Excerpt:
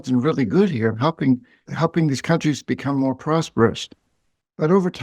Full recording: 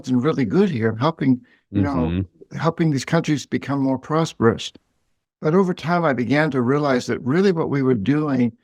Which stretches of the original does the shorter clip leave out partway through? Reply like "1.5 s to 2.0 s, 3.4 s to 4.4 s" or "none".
1.6 s to 2.4 s

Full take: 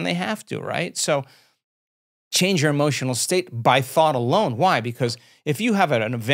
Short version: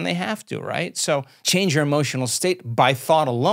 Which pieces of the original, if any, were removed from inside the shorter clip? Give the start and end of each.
1.4 s to 2.2 s

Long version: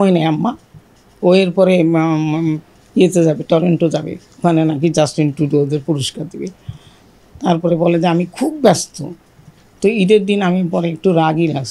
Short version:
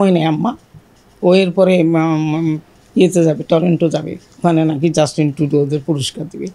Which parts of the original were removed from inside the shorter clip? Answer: none

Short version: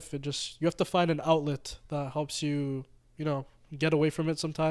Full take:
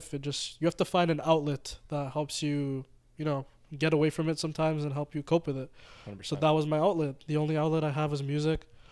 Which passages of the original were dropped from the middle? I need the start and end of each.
none

